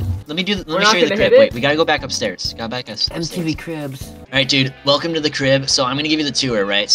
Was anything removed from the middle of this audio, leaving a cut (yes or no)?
no